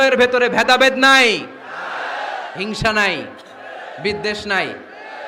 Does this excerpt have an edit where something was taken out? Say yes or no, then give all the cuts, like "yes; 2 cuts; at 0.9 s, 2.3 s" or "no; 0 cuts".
no; 0 cuts